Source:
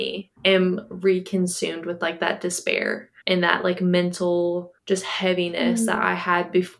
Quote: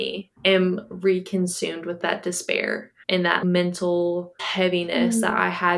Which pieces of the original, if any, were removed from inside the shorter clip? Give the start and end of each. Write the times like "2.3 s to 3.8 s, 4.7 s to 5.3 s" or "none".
2.0 s to 2.1 s, 3.6 s to 3.8 s, 4.8 s to 5.1 s